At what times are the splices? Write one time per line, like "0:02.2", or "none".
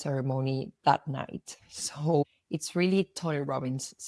none